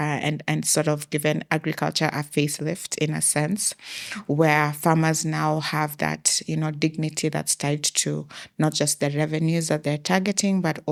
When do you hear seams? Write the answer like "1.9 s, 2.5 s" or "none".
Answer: none